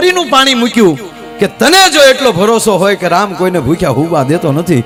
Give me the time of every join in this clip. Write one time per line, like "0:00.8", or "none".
none

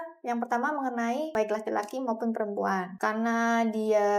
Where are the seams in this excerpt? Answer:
0:01.3
0:02.9

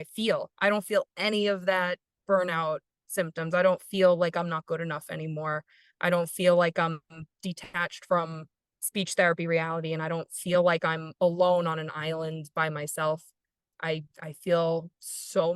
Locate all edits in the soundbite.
none

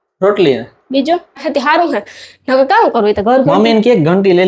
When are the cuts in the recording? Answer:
0:00.9

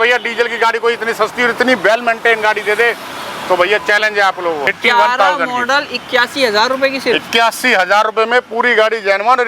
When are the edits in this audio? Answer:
0:04.7

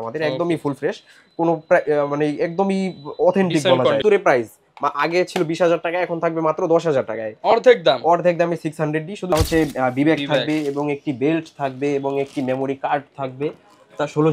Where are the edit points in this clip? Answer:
0:04.0
0:09.3

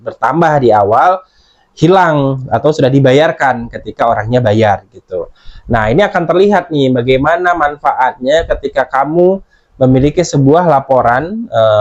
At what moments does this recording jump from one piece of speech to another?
none

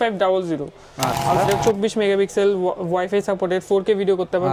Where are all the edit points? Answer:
0:01.4

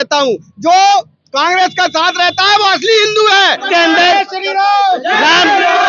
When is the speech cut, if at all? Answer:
0:03.6

